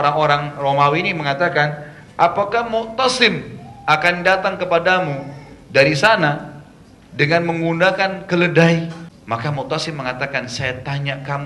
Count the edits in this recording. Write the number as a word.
one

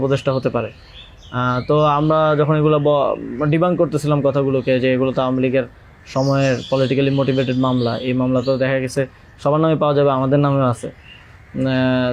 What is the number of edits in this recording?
zero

